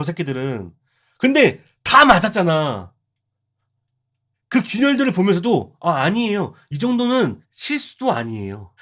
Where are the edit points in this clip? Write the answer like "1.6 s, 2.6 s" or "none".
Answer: 7.5 s